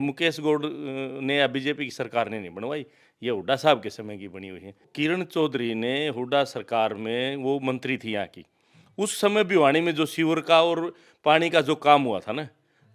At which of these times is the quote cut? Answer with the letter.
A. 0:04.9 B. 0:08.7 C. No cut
A